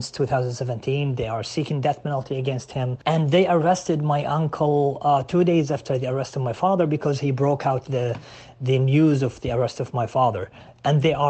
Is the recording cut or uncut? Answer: cut